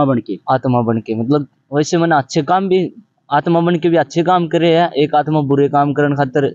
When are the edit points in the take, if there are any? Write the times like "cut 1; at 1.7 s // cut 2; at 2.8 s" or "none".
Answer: none